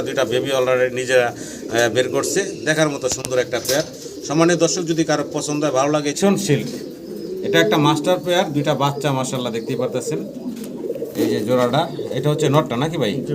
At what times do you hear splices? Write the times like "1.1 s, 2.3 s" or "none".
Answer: 6.2 s